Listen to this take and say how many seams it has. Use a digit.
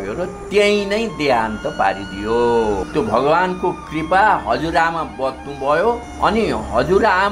2